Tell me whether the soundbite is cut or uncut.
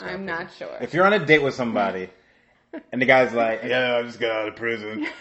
cut